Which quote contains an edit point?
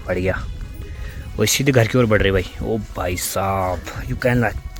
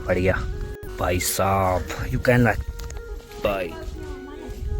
second; 1 cut; at 0.9 s

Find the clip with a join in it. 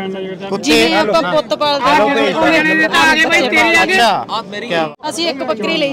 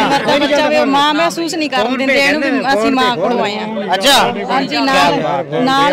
first; 1 cut; at 5.0 s

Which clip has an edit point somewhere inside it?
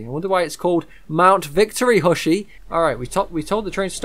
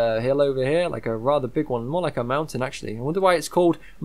first; 1 cut; at 2.6 s

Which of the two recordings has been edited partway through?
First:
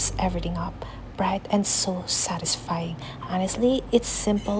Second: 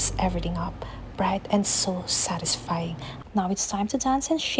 second; 1 cut; at 3.2 s

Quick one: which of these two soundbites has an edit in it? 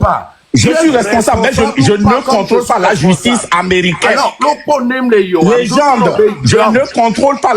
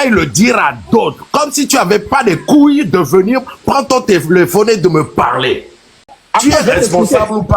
second; 1 cut; at 5.9 s

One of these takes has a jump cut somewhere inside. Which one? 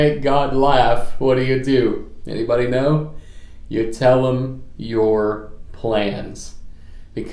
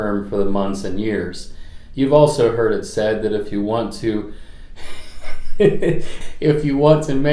second; 1 cut; at 6.1 s

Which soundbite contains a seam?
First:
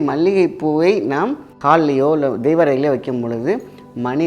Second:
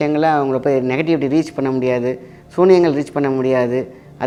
first; 1 cut; at 1.5 s

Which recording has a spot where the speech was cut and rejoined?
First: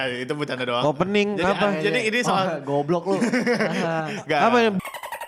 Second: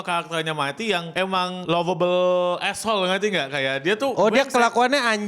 second; 1 cut; at 1.6 s

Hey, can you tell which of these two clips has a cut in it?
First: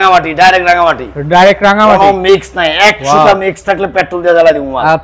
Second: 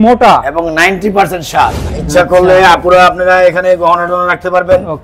second; 1 cut; at 1.9 s

